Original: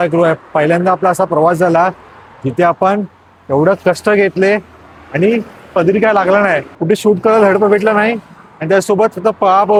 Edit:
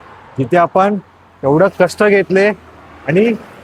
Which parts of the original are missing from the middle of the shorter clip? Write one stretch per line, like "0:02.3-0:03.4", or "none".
none